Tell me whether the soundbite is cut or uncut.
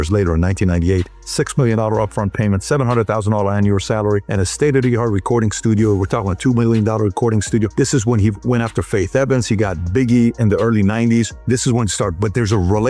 uncut